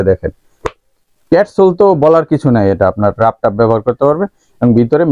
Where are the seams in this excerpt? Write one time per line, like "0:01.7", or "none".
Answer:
none